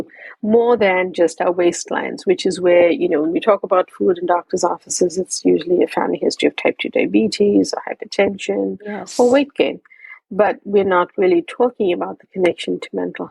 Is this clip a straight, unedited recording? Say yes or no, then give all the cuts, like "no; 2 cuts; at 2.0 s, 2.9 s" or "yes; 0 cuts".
yes; 0 cuts